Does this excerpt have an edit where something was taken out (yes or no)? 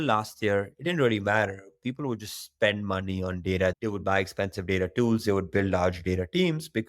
yes